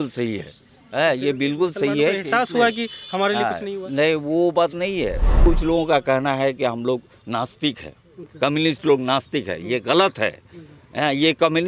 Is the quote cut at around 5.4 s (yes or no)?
yes